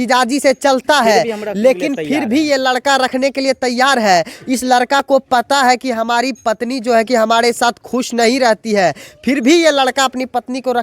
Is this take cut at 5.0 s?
no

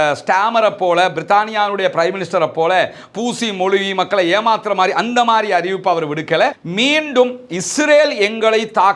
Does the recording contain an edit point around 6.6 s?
yes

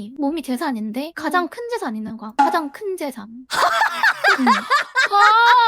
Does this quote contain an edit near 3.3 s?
yes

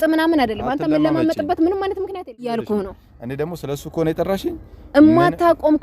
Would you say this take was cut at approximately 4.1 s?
no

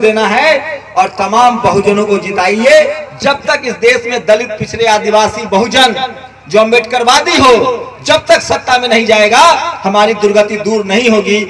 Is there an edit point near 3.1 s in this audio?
yes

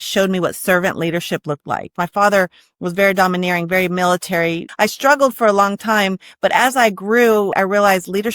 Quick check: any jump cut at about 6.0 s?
no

